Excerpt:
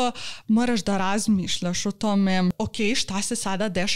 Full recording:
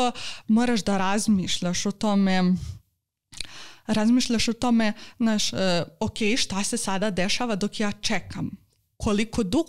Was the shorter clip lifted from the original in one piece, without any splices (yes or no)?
no